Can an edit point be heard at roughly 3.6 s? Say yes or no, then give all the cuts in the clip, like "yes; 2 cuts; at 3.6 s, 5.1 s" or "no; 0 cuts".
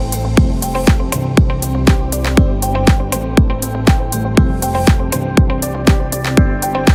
no; 0 cuts